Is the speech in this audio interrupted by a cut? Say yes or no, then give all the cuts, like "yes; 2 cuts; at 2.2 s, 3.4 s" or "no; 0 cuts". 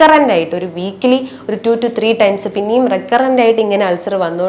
no; 0 cuts